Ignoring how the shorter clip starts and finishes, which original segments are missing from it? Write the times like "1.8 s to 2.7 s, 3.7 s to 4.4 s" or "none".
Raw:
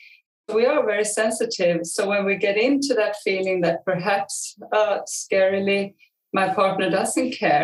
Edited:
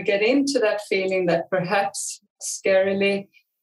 4.7 s to 5.0 s

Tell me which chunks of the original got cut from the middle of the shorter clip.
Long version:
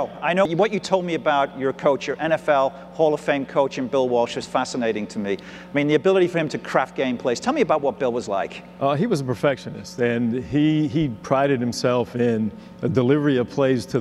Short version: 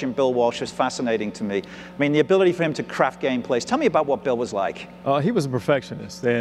none

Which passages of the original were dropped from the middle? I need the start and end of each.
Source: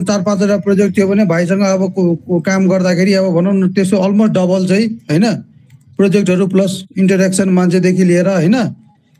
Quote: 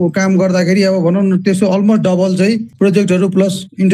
5.0 s to 5.9 s

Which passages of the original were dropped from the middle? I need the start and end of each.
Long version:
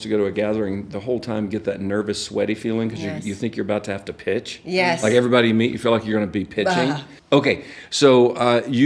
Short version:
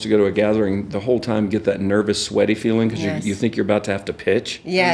none

